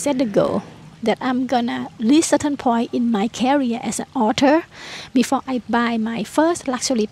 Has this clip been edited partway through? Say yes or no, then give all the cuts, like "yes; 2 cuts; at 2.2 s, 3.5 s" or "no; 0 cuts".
no; 0 cuts